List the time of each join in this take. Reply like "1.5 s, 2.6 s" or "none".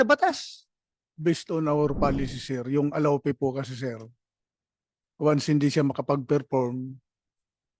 1.1 s